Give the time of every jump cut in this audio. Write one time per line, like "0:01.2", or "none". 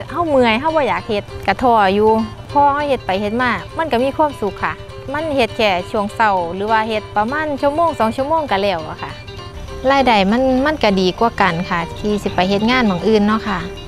0:02.4
0:07.1
0:09.5